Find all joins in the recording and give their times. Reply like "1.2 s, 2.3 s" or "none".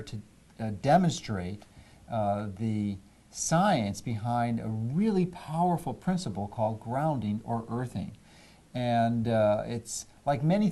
5.4 s